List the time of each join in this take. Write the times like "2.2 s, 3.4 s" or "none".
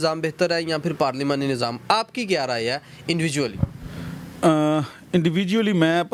none